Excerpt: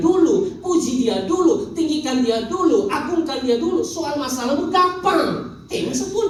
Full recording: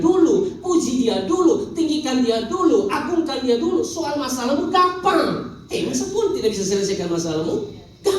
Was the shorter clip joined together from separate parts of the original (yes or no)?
no